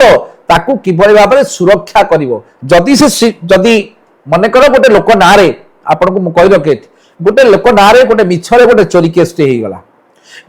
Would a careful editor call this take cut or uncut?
uncut